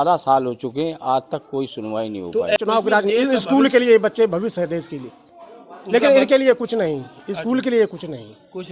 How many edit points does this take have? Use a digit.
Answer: 1